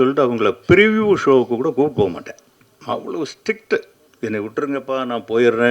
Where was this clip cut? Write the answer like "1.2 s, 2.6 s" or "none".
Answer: 4.0 s